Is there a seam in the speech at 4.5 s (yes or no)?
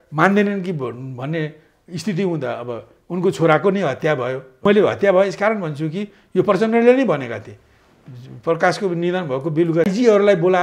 yes